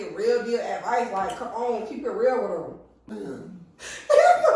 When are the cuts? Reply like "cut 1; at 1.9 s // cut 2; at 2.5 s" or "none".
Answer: cut 1; at 2.9 s